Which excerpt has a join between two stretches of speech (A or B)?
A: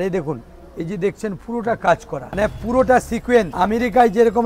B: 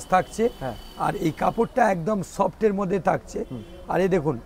A